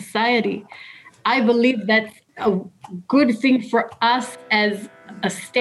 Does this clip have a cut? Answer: yes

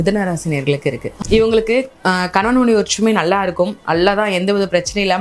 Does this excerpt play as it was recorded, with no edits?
no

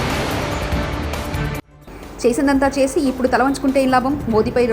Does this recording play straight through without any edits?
no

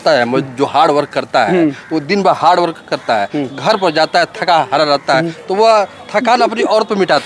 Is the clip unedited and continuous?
yes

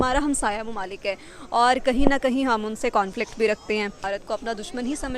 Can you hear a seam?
yes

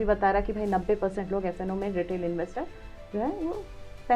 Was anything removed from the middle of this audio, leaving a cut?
no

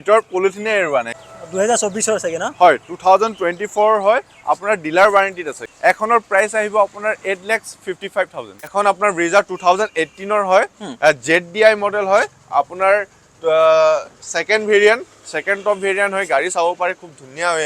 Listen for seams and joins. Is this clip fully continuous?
no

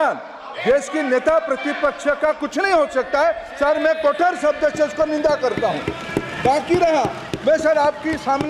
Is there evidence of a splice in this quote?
no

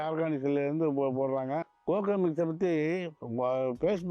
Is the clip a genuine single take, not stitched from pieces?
no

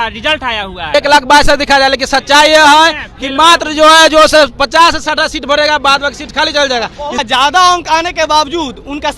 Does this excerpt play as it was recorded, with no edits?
no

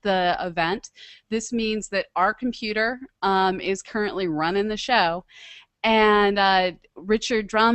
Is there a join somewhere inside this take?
yes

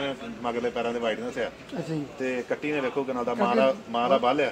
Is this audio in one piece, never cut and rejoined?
yes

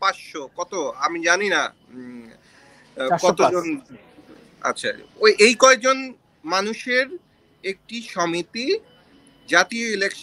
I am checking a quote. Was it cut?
no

